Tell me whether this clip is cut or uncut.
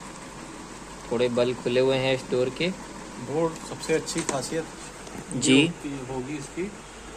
uncut